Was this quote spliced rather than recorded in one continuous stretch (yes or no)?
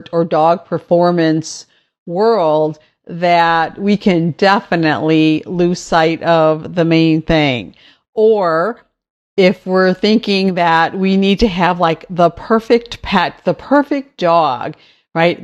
no